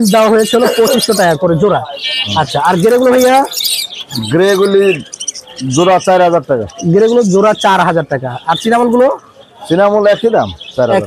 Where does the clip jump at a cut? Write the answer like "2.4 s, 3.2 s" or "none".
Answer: none